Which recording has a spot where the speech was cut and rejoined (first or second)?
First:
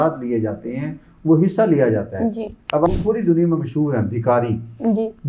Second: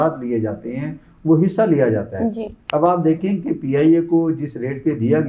first